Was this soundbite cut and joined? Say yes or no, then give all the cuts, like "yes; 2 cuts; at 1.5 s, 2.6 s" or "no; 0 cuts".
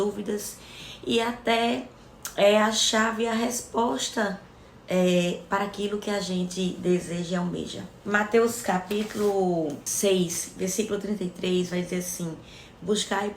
yes; 1 cut; at 9.8 s